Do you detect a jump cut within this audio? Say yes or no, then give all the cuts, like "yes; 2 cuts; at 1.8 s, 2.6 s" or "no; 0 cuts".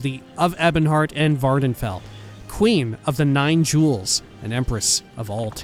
no; 0 cuts